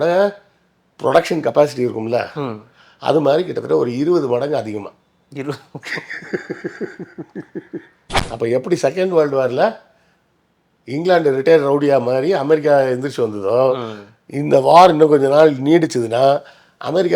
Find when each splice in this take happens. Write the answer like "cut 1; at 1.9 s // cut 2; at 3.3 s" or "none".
cut 1; at 8.2 s